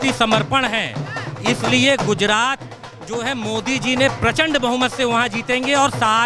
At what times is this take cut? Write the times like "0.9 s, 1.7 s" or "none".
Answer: none